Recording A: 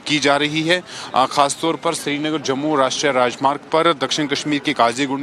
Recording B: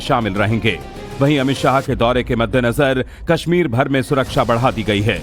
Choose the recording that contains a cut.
A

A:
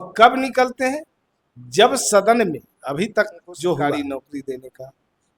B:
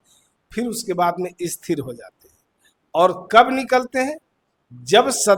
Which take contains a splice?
A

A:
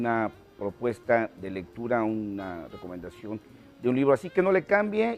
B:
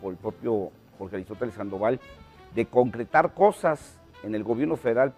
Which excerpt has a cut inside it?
B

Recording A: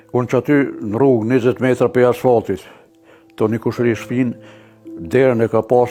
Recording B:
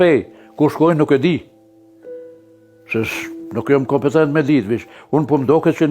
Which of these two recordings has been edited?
B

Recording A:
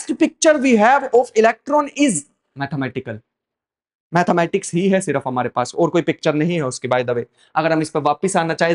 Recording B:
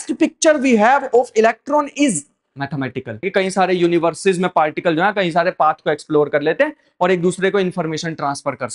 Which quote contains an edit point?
B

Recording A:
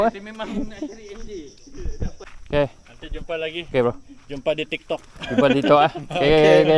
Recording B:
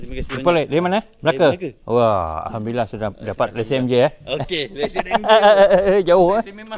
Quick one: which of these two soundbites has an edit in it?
A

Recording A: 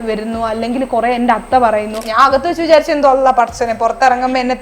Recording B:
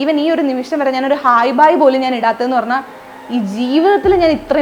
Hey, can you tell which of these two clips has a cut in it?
A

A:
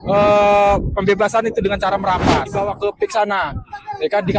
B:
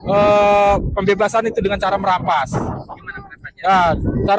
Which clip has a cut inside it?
A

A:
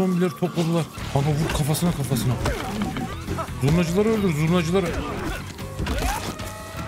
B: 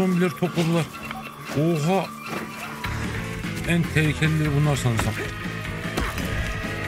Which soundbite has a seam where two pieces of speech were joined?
A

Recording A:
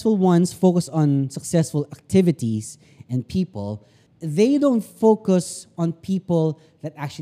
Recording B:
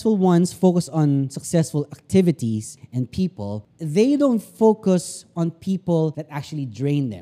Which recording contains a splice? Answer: B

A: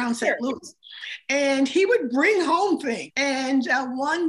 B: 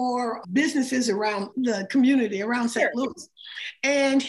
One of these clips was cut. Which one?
A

